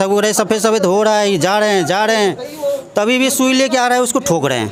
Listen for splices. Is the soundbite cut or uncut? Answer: uncut